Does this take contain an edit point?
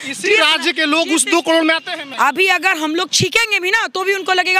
yes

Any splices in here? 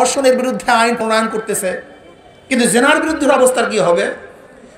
yes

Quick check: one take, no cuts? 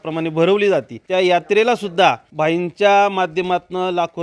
no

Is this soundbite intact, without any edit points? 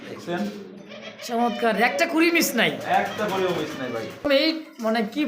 no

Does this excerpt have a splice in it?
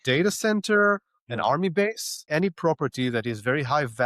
yes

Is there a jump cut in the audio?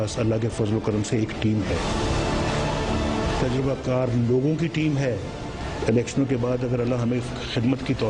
no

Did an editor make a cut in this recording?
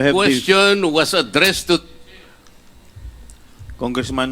yes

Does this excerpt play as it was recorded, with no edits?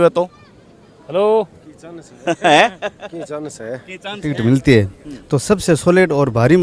no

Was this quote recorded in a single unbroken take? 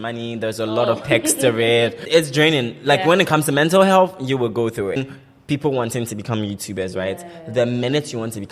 no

